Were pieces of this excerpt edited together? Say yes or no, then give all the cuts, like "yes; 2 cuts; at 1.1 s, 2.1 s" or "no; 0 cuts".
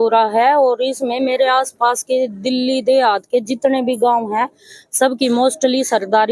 no; 0 cuts